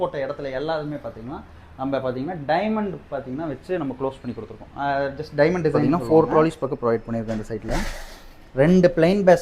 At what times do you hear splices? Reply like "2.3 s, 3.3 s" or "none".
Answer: 5.8 s